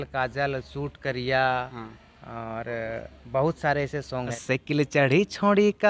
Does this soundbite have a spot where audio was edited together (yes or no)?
yes